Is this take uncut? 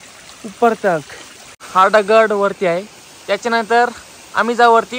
no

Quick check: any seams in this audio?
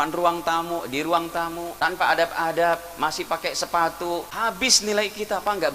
yes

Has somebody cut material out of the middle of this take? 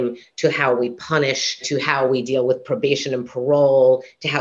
yes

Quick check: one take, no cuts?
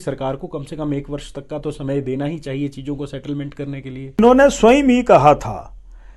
no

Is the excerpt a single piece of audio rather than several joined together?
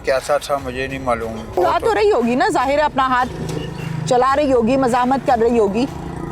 no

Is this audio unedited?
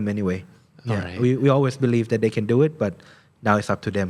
yes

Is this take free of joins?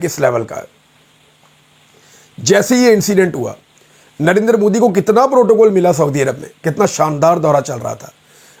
yes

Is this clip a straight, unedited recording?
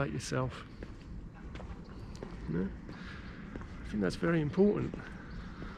yes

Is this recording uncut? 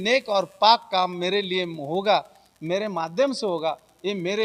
yes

